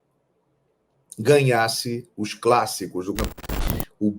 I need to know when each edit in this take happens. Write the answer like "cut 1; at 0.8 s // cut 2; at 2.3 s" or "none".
cut 1; at 3.3 s